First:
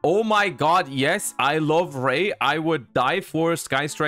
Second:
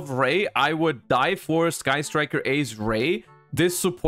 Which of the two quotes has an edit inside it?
first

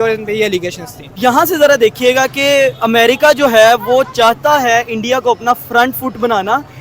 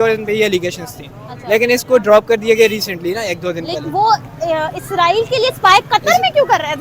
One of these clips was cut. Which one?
first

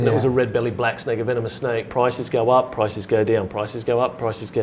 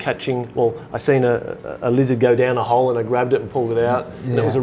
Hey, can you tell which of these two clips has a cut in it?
first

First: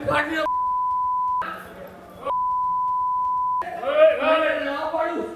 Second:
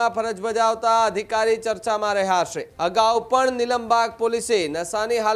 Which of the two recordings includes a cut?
second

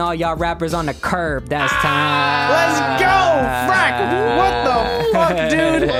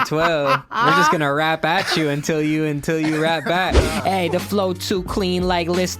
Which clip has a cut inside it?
second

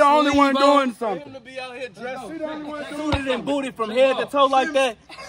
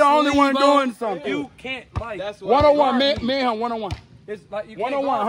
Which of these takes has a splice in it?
second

